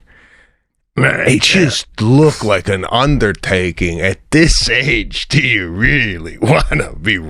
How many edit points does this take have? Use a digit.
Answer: 0